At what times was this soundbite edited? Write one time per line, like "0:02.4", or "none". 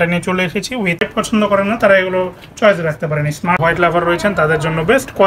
0:01.0
0:03.6